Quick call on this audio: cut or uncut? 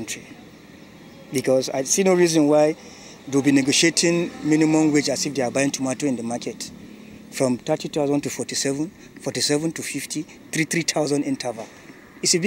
uncut